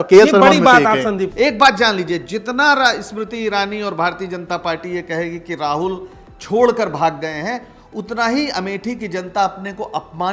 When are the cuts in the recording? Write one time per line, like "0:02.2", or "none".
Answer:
0:01.3